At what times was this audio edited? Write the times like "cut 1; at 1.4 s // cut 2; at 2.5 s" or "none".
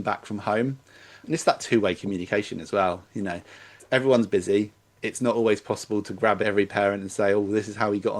cut 1; at 1.2 s // cut 2; at 3.8 s // cut 3; at 6.4 s